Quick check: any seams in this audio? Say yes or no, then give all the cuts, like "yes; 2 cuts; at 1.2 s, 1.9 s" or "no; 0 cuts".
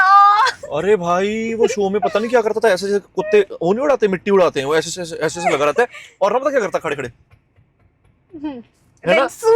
no; 0 cuts